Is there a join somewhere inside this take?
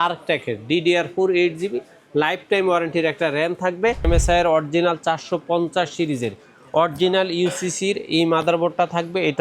yes; 1 cut; at 4.1 s

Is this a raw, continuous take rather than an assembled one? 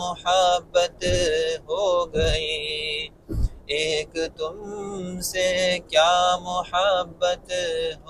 yes; 0 cuts

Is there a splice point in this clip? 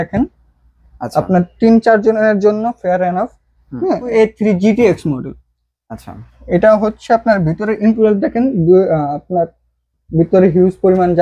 yes; 1 cut; at 4.1 s

